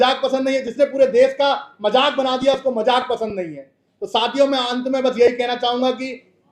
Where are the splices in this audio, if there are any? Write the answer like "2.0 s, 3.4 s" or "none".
none